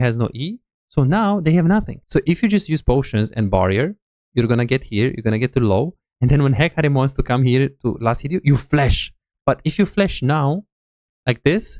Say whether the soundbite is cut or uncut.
cut